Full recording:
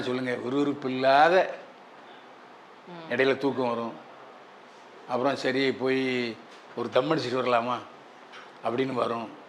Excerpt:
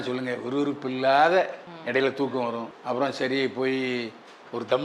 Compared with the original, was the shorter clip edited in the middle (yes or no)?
yes